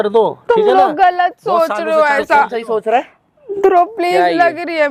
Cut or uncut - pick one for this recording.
uncut